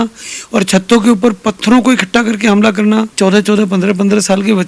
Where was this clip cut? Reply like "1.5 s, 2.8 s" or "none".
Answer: 3.1 s